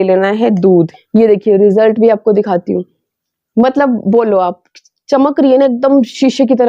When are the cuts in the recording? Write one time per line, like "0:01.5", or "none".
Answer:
0:00.9